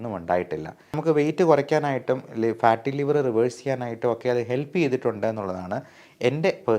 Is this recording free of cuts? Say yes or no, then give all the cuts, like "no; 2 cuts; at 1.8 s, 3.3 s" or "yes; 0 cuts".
no; 1 cut; at 0.9 s